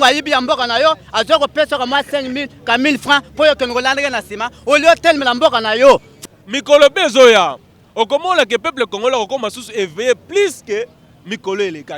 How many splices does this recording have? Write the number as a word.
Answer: one